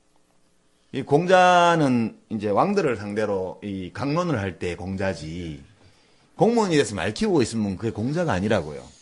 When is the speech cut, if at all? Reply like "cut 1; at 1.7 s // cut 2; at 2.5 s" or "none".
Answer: cut 1; at 7.7 s